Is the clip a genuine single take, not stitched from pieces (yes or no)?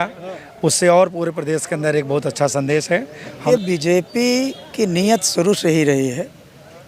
no